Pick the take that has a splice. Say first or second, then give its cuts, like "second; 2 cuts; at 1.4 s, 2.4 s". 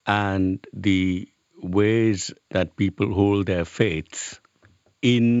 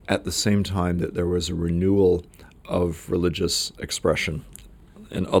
first; 1 cut; at 2.3 s